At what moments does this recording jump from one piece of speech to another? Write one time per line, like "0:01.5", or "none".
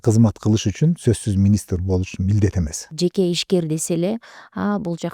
0:02.9